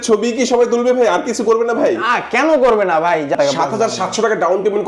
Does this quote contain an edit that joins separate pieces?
yes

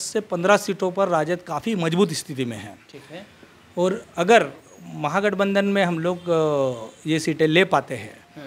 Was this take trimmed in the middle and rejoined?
no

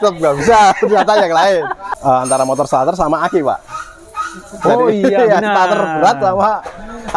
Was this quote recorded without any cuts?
no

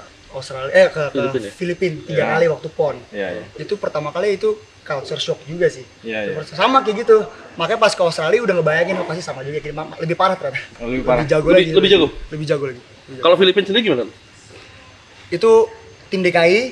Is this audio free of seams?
yes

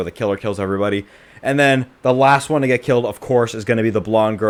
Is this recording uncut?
yes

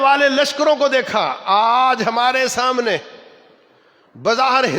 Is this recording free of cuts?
yes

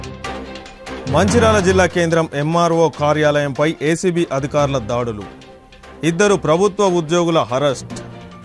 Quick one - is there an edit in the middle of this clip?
no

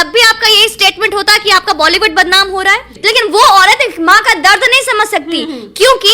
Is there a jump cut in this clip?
yes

